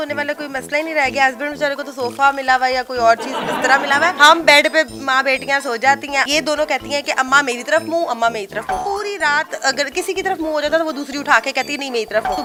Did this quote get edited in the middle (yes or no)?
no